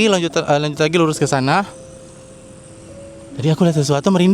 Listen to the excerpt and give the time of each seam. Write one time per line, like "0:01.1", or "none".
none